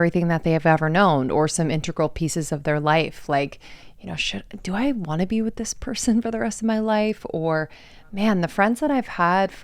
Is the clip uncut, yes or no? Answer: yes